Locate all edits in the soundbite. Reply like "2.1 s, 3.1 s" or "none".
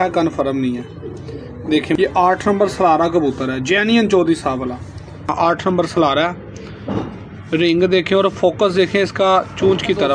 1.9 s, 5.3 s